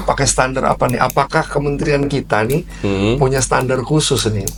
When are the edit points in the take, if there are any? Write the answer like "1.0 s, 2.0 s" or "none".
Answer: none